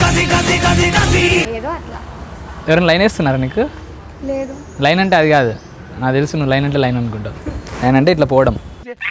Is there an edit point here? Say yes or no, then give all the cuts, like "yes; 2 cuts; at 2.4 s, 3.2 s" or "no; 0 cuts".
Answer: no; 0 cuts